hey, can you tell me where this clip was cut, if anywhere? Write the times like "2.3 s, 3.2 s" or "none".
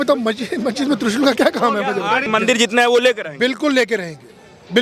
2.3 s